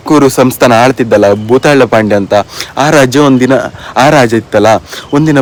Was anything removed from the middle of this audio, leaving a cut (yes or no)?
no